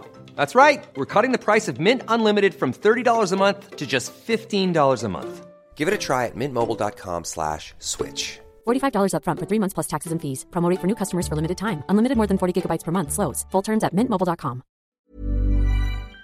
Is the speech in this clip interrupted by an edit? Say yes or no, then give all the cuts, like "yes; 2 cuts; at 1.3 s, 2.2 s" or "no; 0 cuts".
yes; 1 cut; at 14.9 s